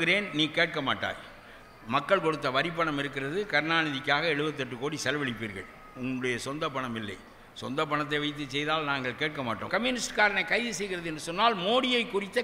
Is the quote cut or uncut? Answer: cut